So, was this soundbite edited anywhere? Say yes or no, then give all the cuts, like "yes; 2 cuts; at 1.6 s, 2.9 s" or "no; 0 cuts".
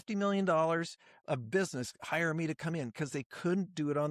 no; 0 cuts